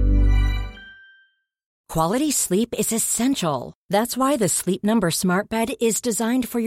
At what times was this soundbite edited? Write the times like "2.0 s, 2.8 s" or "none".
1.8 s

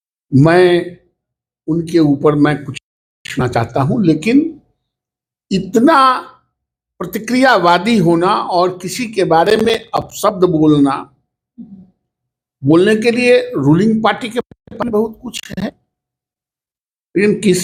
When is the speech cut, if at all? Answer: none

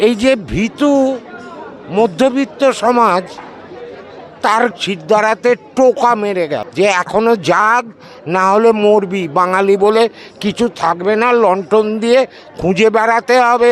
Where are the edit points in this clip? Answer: 4.7 s

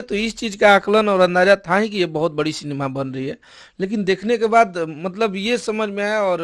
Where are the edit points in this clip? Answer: none

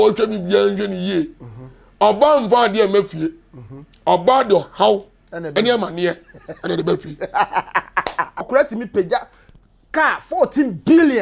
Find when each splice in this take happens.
8.5 s

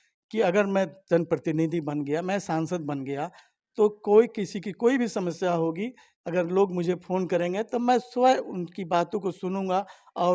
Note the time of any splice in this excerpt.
none

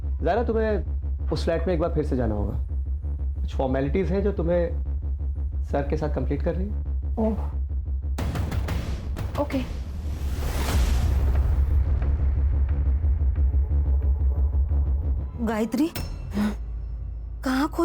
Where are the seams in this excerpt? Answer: 15.3 s

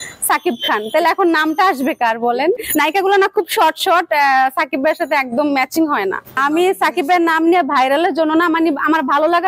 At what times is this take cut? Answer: 2.6 s, 6.4 s

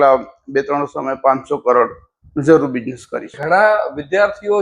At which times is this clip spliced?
3.4 s

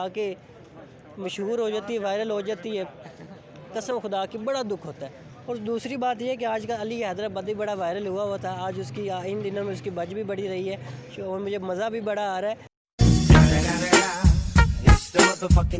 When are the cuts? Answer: none

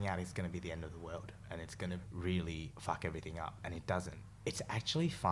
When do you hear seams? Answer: 2.1 s, 2.7 s, 4.2 s

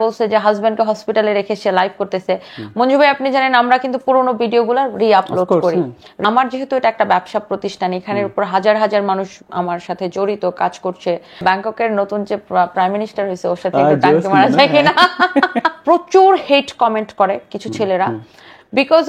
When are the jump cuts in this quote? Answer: 6.2 s, 11.4 s, 15.7 s

